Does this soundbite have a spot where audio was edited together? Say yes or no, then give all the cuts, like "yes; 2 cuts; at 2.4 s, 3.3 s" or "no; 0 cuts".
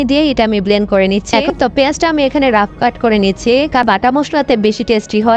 yes; 2 cuts; at 1.5 s, 3.8 s